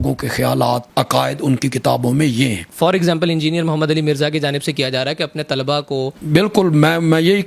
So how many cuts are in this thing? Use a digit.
3